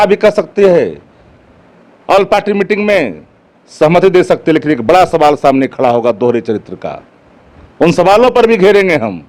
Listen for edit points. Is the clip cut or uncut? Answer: uncut